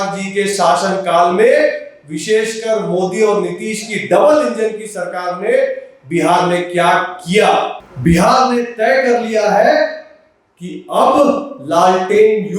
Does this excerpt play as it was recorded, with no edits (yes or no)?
no